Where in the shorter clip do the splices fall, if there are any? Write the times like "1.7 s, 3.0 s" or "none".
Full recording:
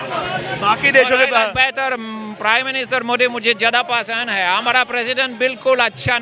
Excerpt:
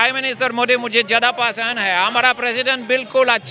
none